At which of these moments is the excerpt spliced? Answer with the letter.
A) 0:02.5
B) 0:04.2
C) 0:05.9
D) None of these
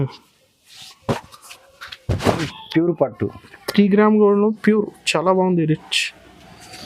A